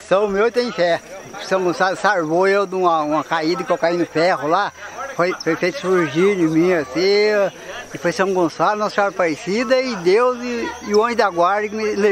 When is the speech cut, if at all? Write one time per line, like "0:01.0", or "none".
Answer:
0:01.4